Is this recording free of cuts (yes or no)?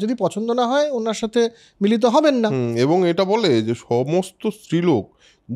yes